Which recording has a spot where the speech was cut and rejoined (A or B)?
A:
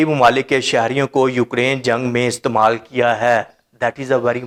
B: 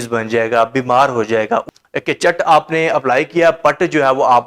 B